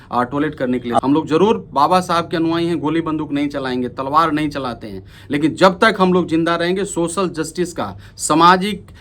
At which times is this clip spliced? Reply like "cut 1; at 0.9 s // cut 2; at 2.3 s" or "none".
cut 1; at 1.0 s